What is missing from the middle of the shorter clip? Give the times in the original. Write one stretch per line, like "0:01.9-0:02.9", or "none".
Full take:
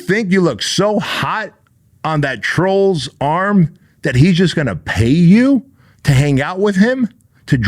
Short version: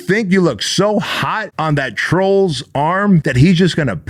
0:01.5-0:01.9
0:03.7-0:04.1